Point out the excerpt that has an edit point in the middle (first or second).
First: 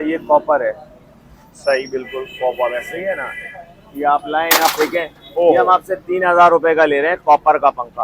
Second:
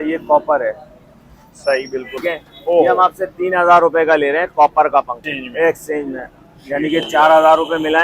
second